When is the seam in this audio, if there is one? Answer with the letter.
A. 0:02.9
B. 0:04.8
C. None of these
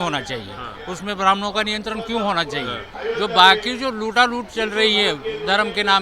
A